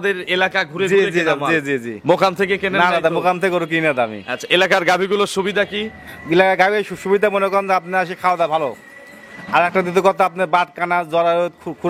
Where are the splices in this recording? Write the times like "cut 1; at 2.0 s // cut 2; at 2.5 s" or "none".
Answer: none